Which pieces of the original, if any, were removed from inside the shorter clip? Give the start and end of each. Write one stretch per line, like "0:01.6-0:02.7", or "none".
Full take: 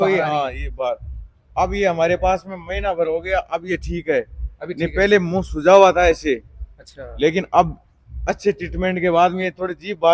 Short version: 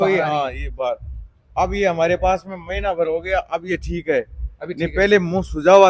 none

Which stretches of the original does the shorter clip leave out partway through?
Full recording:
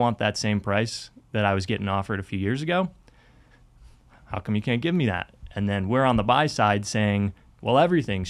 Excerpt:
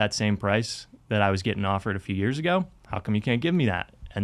0:03.1-0:04.2

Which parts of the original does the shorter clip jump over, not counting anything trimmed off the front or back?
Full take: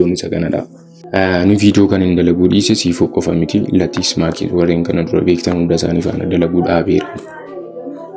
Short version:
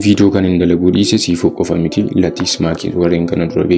none

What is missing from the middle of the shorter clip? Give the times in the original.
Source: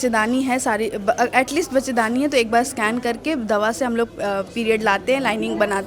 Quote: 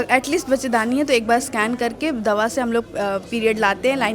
none

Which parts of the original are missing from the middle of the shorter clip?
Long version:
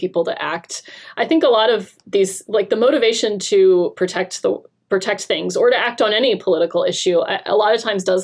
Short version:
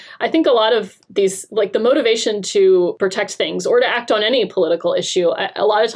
0:03.9-0:04.8

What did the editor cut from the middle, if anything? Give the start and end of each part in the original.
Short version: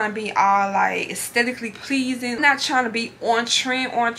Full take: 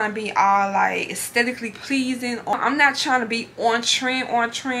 0:02.4-0:02.8

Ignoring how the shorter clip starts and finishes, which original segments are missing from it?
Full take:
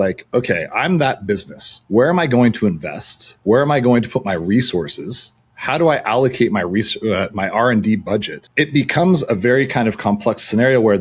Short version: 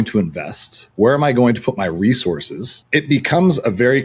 0:05.2-0:08.4

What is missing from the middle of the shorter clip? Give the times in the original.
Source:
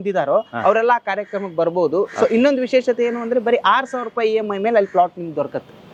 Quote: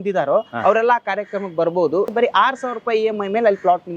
0:02.1-0:03.4

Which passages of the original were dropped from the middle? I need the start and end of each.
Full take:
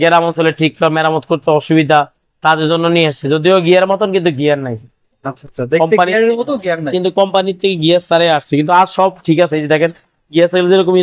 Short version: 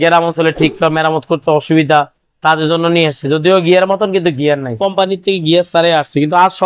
0:04.8-0:07.1

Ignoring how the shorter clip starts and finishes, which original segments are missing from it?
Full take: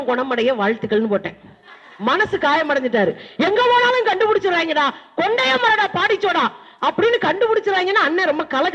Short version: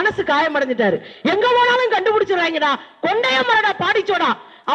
none

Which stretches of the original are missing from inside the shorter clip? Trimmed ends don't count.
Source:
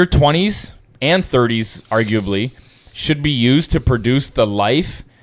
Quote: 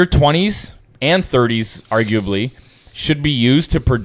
none

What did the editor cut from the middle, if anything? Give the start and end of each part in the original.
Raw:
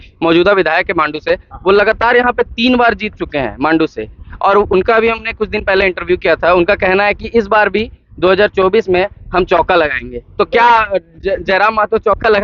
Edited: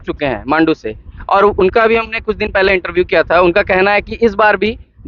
none

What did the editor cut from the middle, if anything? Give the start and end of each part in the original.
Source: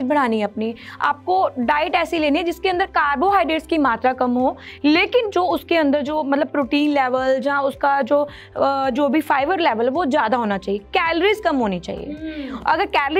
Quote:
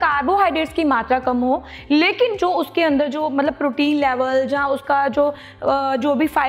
none

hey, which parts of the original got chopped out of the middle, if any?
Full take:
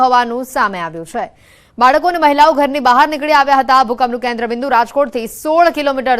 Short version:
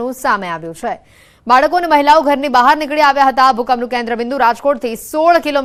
none

